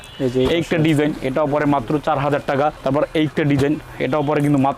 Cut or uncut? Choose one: uncut